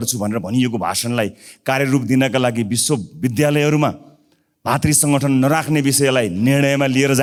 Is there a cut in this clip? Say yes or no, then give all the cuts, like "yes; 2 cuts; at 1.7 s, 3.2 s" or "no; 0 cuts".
no; 0 cuts